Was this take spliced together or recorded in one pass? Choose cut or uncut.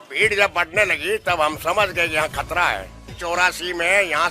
cut